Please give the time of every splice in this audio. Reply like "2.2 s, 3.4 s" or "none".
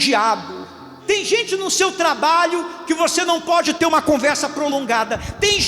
0.9 s